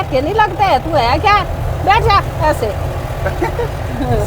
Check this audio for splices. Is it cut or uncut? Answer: uncut